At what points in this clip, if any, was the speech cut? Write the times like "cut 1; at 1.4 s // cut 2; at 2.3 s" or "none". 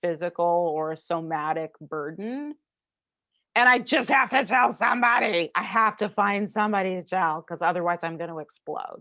none